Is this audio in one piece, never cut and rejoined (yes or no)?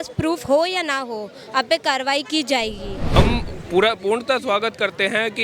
no